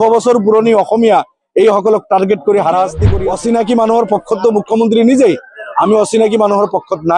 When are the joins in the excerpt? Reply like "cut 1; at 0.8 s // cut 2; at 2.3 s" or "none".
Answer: cut 1; at 3.1 s